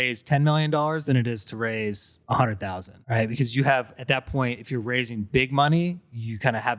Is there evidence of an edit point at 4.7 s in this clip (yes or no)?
no